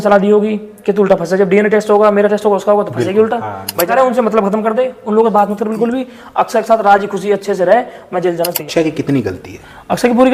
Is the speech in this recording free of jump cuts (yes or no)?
no